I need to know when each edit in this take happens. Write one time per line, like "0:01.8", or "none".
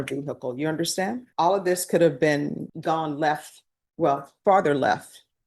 0:01.2
0:02.7